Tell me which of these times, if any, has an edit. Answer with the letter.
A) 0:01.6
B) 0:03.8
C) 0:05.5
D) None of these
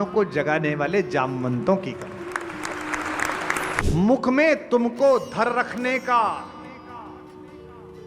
B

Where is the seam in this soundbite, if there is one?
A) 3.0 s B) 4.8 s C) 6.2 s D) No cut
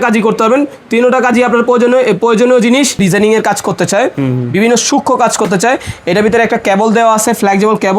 A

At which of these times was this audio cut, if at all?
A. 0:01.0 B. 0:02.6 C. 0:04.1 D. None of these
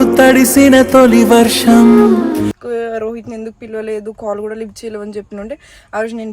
B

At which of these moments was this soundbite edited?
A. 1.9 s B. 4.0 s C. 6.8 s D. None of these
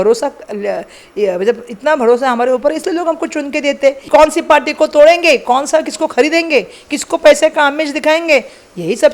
B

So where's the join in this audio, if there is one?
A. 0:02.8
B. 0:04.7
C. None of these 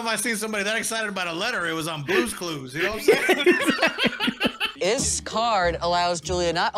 B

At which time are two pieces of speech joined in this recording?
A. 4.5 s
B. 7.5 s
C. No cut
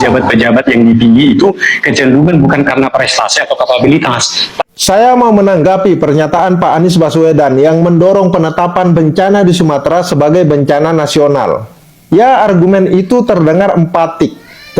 A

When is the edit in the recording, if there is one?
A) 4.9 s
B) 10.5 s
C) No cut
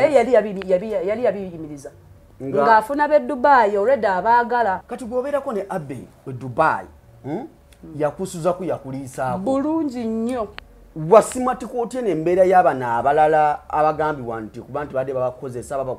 A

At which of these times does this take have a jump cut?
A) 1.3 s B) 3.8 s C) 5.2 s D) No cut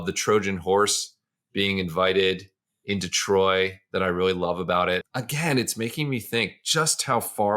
C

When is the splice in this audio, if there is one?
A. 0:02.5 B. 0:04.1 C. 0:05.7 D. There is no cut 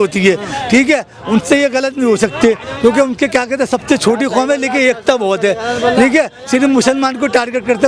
D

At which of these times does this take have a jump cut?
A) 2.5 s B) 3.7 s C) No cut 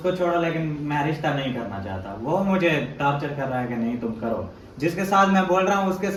C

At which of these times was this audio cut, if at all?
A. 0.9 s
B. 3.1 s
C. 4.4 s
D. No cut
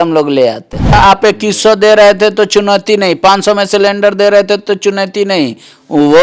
A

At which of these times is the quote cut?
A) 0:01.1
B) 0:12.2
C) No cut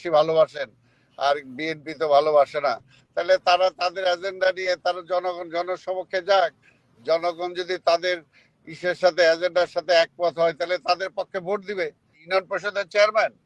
B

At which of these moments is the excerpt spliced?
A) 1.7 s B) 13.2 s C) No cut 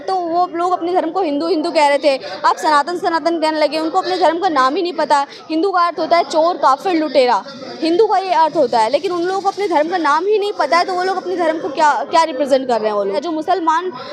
B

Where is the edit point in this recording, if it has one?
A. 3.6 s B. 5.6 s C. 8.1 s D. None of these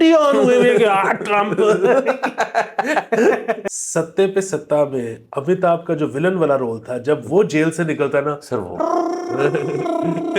A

